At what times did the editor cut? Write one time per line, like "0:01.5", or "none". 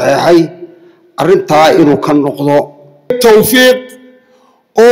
0:03.1